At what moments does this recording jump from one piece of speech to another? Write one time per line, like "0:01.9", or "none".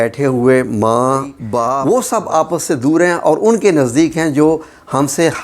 0:01.7